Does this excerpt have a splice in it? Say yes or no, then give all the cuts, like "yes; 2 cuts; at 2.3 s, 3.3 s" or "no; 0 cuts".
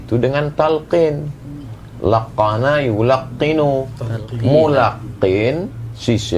no; 0 cuts